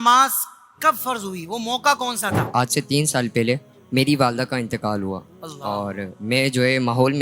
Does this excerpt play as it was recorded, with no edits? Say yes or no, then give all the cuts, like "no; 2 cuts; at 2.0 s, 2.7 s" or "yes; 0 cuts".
no; 2 cuts; at 2.5 s, 3.7 s